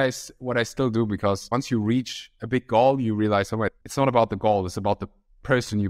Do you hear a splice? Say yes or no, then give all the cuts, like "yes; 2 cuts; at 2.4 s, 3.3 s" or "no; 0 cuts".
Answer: yes; 2 cuts; at 1.4 s, 3.8 s